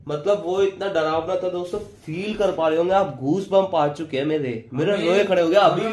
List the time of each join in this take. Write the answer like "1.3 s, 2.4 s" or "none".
none

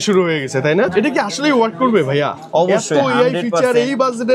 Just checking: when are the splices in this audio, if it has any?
0.9 s

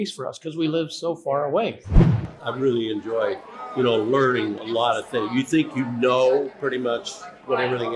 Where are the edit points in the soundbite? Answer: 2.2 s, 3.5 s

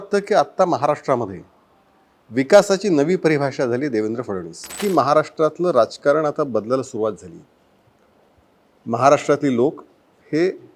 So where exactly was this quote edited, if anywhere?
4.8 s

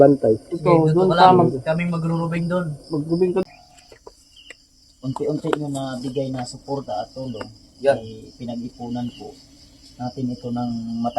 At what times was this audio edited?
3.4 s

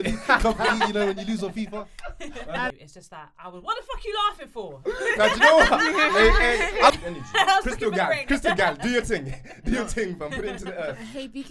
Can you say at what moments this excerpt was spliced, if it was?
2.7 s, 6.9 s

